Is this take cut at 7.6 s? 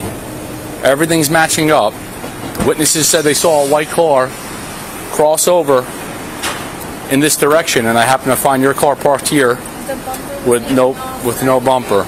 no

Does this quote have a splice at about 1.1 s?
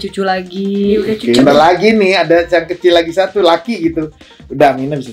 yes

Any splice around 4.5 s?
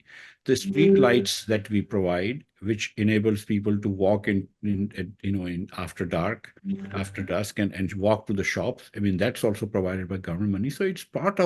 no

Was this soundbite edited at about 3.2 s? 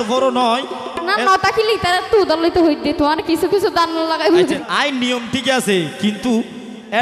no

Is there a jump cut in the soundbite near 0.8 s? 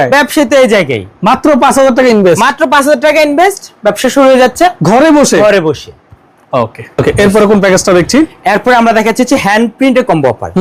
no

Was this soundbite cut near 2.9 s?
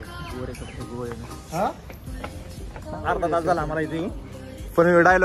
yes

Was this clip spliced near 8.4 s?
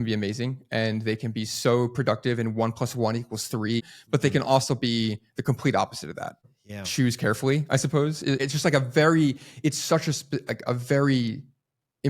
yes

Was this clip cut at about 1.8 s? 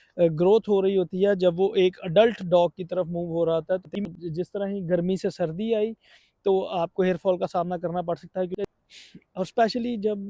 no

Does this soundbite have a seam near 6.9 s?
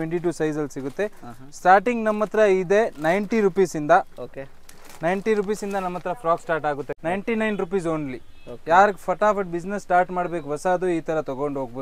yes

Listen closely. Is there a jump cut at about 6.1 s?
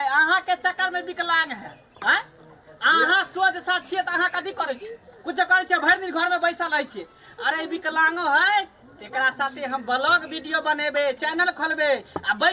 no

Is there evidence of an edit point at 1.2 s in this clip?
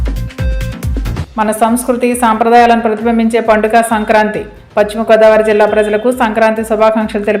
yes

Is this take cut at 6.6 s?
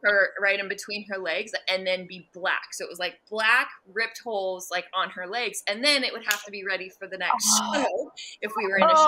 no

